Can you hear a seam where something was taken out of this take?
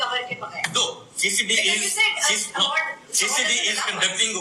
no; 0 cuts

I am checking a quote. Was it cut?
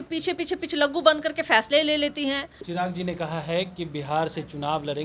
yes; 1 cut; at 2.5 s

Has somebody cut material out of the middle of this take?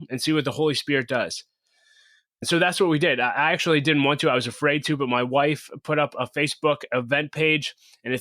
yes; 1 cut; at 2.4 s

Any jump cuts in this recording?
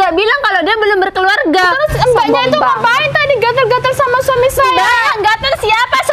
yes; 1 cut; at 1.6 s

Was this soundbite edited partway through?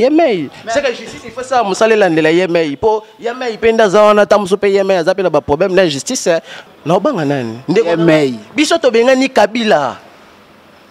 yes; 1 cut; at 6.5 s

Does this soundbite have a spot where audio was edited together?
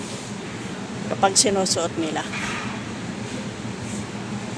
no; 0 cuts

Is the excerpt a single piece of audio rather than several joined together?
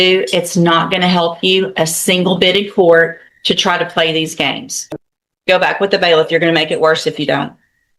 no; 1 cut; at 4.7 s

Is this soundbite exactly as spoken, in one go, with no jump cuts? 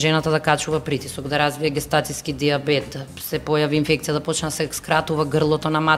yes; 0 cuts

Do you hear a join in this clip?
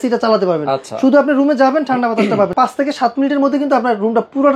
yes; 1 cut; at 2.5 s

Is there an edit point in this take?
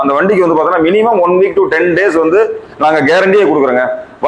no; 0 cuts

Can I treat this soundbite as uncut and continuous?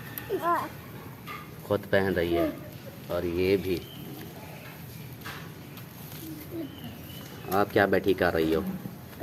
yes; 0 cuts

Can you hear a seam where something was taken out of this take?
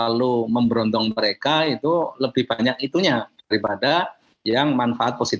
no; 0 cuts

